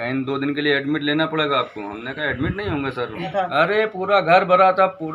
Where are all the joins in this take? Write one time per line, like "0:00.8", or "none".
0:03.3